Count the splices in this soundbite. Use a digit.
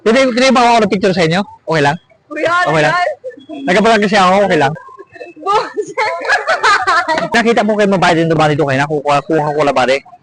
2